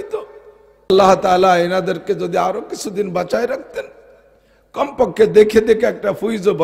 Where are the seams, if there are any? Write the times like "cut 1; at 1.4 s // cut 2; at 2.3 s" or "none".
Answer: cut 1; at 0.9 s